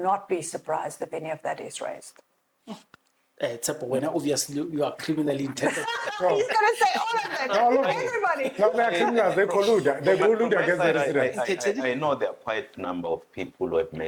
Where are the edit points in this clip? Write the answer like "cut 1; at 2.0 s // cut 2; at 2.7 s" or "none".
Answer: none